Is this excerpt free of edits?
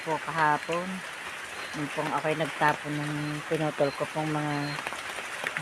yes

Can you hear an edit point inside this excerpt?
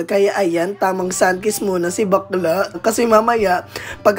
yes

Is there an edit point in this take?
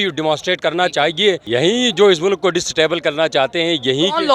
yes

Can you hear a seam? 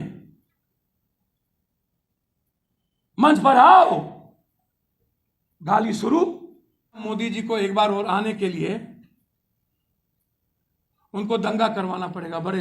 yes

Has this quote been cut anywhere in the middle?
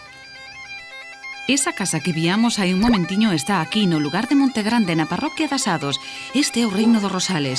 no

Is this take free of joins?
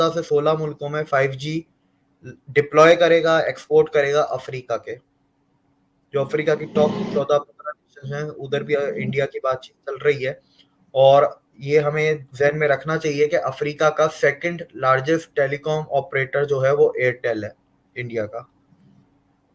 yes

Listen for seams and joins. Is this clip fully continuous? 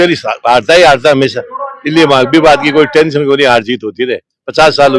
yes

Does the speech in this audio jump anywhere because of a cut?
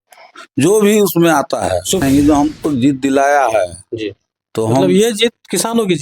yes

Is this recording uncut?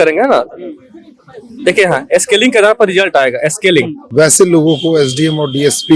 no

